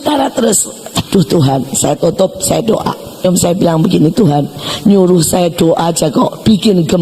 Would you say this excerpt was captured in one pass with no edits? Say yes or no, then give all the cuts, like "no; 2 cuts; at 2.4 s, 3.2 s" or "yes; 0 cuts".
no; 2 cuts; at 1.0 s, 3.2 s